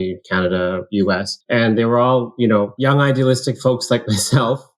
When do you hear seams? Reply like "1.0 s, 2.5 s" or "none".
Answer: 1.3 s, 2.7 s

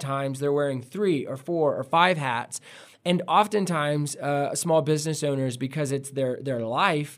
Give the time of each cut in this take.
none

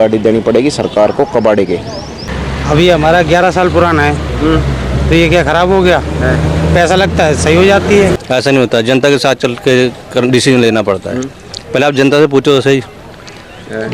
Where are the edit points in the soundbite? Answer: 2.4 s, 8.2 s

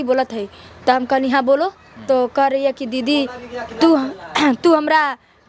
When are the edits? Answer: none

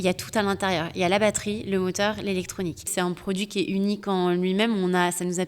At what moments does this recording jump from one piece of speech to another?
2.9 s

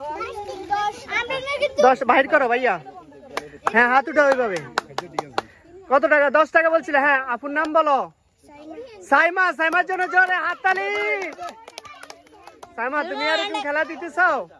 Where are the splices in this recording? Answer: none

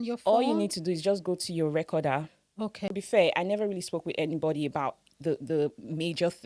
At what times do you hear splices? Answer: 2.8 s

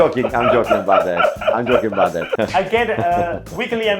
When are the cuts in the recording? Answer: 2.3 s

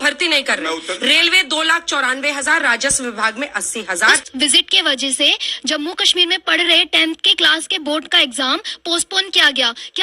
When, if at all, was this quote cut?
4.2 s

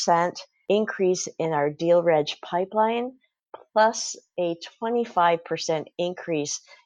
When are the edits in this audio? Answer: none

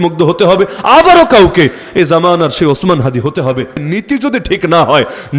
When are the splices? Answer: 3.8 s

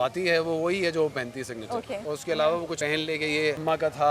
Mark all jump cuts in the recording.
2.0 s, 3.1 s

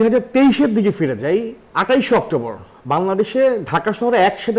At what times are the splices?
1.6 s

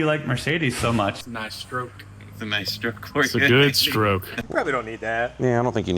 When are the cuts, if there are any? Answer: 1.2 s, 4.4 s

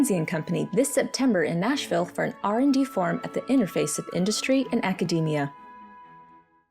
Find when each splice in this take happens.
5.5 s

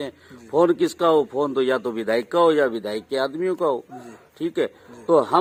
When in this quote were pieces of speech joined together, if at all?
none

